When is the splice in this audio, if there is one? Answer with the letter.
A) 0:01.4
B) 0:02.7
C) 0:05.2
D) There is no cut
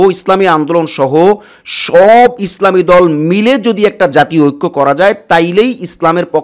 D